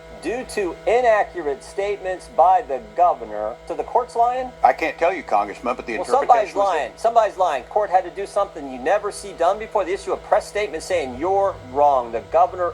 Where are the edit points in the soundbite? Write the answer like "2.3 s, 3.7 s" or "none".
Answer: 3.8 s, 4.5 s, 7.7 s